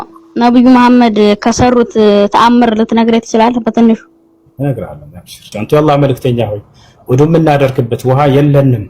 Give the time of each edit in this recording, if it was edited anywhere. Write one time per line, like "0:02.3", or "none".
0:05.6